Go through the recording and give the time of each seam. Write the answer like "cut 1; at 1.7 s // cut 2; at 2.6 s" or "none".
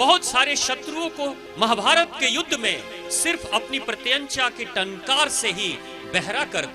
cut 1; at 1.4 s